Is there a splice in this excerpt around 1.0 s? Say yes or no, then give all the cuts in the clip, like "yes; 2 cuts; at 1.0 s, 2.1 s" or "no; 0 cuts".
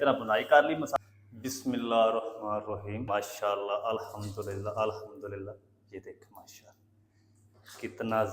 yes; 2 cuts; at 1.0 s, 3.0 s